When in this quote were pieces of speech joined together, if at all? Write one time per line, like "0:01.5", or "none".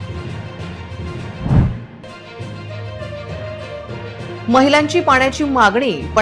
none